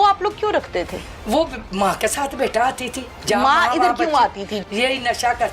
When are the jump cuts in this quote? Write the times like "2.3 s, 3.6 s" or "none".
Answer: 4.6 s